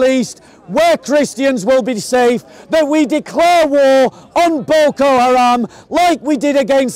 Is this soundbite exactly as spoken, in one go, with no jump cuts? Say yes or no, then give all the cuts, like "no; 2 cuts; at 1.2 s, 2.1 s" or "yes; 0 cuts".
yes; 0 cuts